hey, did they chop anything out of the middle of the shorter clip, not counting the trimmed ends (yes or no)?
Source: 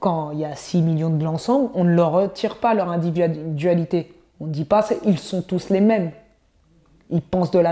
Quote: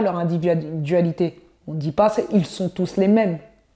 no